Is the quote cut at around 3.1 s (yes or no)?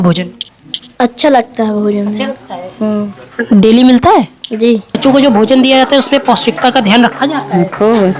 no